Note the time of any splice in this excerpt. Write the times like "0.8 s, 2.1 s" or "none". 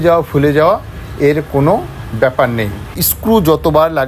3.0 s